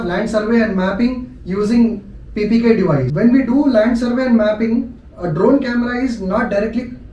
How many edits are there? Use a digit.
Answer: 1